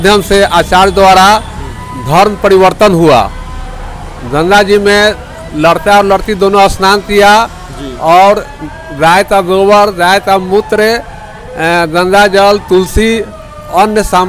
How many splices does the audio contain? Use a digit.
0